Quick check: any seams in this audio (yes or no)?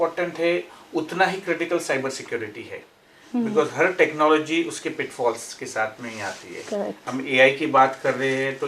no